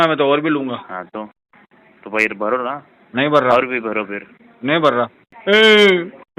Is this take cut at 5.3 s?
yes; 1 cut; at 5.3 s

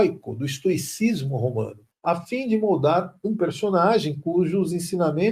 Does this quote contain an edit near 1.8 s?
yes; 1 cut; at 1.8 s

